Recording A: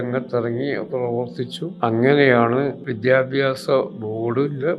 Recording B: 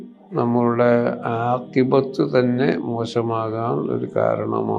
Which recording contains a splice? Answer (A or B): A